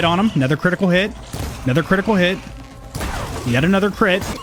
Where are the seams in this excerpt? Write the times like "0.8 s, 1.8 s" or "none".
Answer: none